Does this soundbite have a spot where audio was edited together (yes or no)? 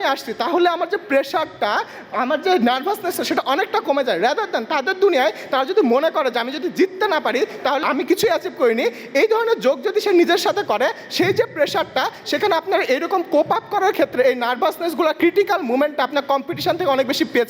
yes